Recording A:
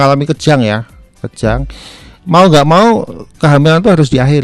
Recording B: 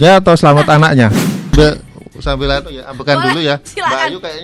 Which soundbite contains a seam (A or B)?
B